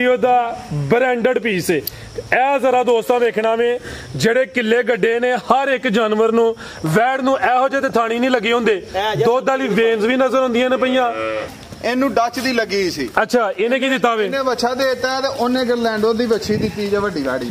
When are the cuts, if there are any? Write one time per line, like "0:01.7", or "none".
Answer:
0:11.5